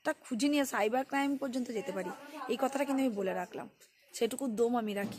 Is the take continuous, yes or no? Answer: yes